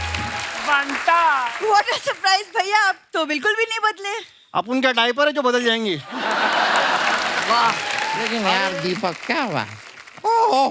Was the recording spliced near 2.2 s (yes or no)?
no